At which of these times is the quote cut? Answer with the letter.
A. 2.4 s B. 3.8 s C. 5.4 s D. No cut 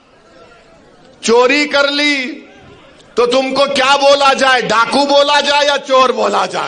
D